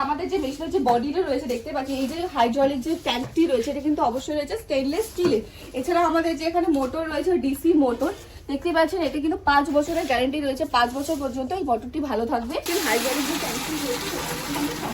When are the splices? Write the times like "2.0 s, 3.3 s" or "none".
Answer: 12.7 s